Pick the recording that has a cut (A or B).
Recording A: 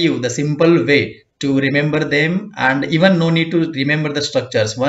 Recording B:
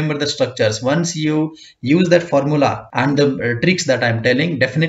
B